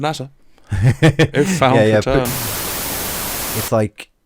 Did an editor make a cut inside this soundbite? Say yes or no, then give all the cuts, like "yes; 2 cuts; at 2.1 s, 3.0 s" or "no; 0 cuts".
yes; 1 cut; at 3.0 s